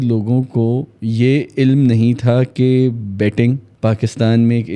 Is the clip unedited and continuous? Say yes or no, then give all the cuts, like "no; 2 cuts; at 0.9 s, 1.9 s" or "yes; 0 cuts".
no; 2 cuts; at 0.9 s, 3.7 s